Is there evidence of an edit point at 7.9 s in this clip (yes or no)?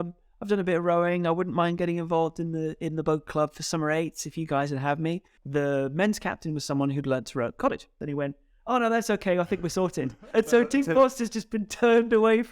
yes